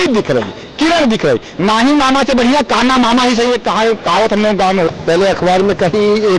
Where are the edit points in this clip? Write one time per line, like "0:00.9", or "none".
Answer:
0:05.0